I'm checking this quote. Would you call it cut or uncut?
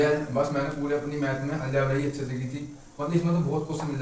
uncut